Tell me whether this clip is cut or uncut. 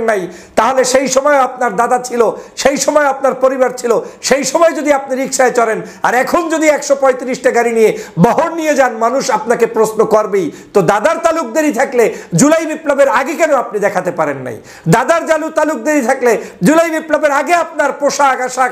uncut